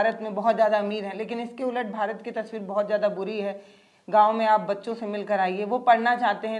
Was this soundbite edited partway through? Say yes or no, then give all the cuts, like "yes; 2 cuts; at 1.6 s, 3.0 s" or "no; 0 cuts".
no; 0 cuts